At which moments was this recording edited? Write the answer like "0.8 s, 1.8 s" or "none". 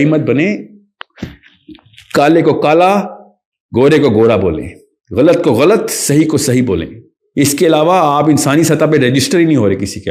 none